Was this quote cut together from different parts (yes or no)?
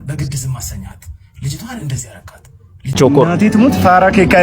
yes